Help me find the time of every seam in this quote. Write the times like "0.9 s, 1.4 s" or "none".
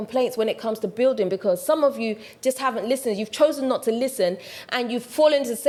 none